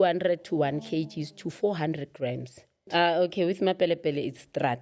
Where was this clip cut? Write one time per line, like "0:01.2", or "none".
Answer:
0:02.8